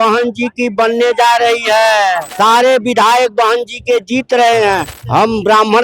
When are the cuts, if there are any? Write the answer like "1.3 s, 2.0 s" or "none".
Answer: 2.3 s, 4.9 s